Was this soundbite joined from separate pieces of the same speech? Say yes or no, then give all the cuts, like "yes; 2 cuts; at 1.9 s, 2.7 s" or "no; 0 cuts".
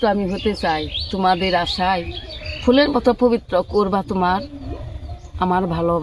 no; 0 cuts